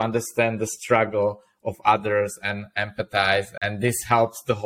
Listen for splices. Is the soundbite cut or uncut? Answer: cut